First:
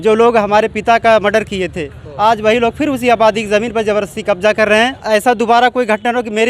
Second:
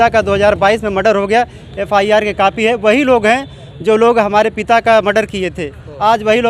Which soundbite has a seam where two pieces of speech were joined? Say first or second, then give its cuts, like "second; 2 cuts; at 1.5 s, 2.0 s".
first; 1 cut; at 5.0 s